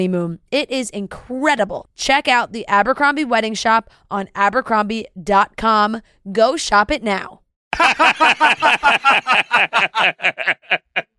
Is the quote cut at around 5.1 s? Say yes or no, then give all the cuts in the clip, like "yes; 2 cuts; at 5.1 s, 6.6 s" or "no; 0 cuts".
no; 1 cut; at 7.7 s